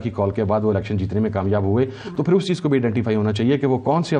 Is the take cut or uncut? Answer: uncut